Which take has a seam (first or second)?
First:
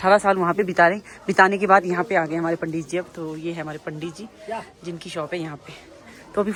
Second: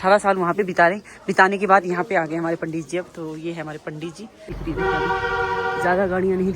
second